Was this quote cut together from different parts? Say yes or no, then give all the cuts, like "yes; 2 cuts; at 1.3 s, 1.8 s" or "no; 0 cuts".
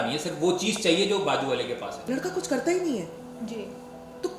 yes; 1 cut; at 1.9 s